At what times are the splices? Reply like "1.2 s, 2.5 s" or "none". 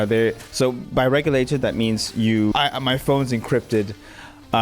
2.5 s